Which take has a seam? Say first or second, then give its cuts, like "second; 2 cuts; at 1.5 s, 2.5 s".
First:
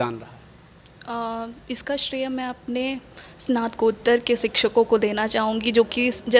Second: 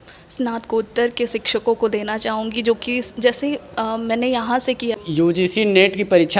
second; 1 cut; at 5.5 s